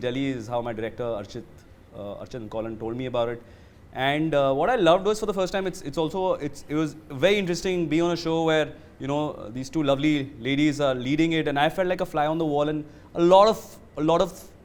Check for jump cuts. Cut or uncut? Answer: uncut